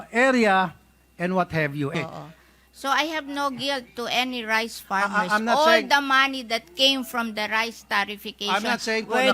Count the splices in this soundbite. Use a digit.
1